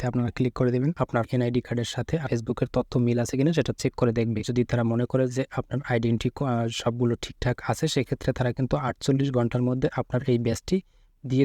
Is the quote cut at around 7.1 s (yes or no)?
no